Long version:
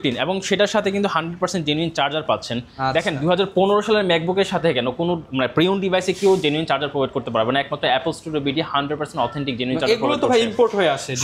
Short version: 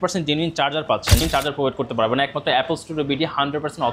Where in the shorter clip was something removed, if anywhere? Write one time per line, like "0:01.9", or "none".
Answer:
0:01.2